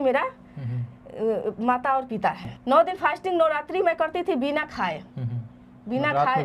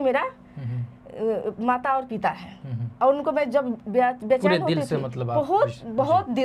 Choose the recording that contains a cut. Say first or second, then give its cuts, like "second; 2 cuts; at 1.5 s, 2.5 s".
first; 1 cut; at 2.5 s